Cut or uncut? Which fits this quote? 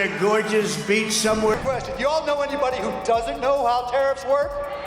cut